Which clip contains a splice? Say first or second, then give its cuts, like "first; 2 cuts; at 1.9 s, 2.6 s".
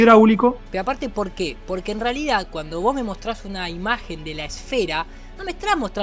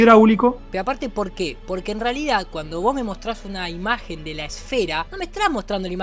second; 1 cut; at 5.1 s